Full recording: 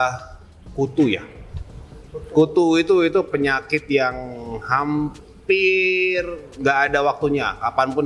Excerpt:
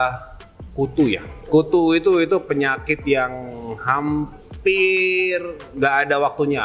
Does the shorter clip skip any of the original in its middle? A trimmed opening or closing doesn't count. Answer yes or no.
yes